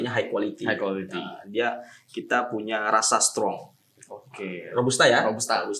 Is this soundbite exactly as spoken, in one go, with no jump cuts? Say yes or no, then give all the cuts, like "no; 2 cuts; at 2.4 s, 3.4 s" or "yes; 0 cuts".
yes; 0 cuts